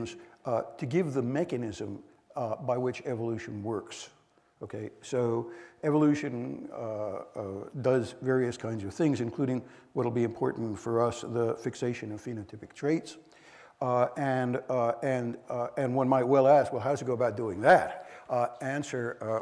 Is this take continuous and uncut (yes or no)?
yes